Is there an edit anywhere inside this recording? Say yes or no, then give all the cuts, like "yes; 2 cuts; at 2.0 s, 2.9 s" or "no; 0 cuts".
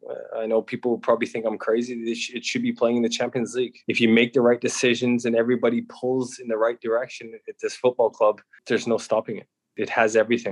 yes; 3 cuts; at 3.8 s, 8.5 s, 9.6 s